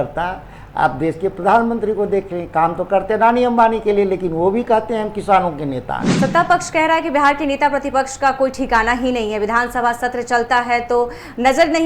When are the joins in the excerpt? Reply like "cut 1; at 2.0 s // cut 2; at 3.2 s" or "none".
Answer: cut 1; at 6.0 s